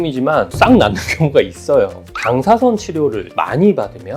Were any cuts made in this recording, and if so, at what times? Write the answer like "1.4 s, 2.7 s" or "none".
2.1 s